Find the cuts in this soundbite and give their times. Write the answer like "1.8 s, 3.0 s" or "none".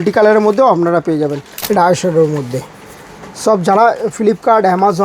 1.5 s